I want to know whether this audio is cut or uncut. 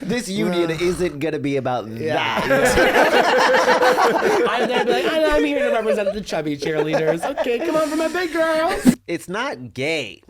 cut